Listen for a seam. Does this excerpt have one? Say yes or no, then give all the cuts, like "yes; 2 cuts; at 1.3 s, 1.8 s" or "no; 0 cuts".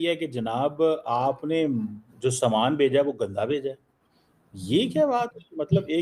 no; 0 cuts